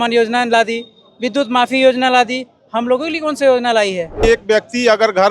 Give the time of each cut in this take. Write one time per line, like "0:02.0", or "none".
0:04.1